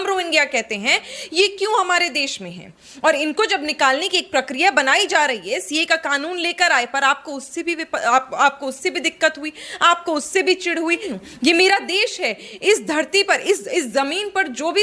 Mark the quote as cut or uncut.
cut